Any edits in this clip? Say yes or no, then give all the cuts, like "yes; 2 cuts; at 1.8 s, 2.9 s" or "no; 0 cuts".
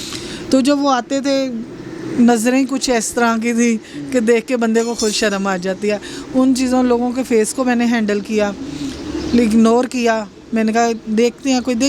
no; 0 cuts